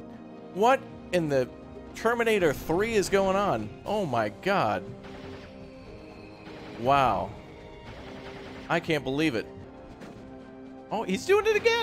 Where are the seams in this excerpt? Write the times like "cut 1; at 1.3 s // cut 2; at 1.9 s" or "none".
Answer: cut 1; at 9.6 s